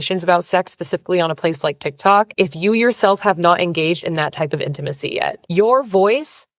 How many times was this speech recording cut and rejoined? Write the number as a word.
zero